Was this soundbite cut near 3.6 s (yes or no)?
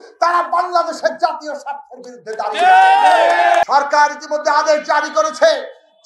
yes